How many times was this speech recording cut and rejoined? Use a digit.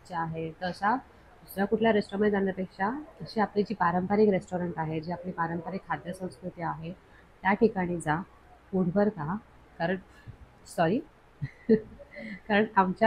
0